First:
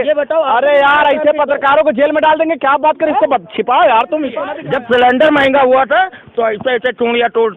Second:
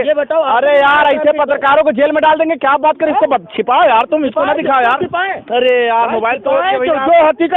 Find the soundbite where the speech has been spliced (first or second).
first